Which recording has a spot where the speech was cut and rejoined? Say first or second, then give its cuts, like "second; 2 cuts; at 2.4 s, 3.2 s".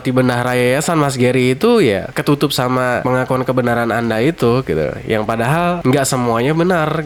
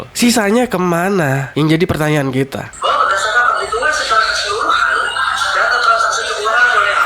second; 1 cut; at 2.6 s